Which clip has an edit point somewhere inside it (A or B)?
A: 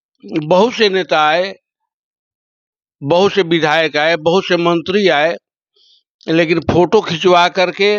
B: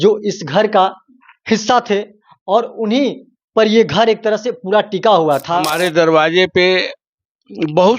B